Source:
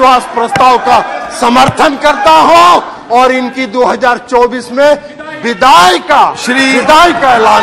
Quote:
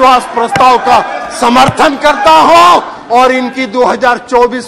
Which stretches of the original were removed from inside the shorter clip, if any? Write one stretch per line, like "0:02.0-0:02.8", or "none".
none